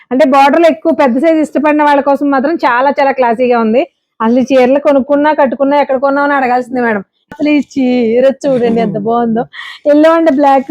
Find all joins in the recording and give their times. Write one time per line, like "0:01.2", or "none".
0:07.3